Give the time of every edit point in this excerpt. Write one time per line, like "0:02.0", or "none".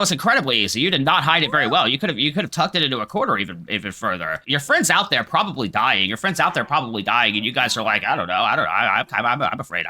0:04.4